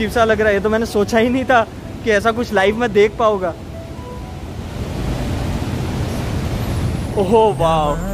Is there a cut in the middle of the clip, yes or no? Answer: no